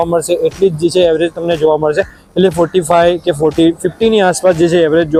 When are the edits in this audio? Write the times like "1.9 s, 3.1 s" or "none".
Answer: none